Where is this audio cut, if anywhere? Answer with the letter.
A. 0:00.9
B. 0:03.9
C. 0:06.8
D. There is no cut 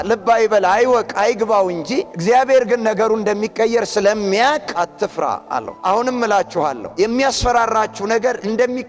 C